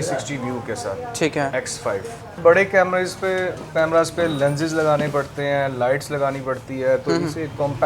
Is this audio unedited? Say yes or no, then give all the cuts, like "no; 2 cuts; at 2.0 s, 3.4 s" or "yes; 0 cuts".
no; 1 cut; at 2.4 s